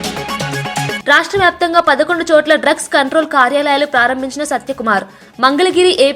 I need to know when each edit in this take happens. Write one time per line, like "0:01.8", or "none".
0:01.0